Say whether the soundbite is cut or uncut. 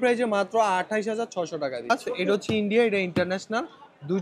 cut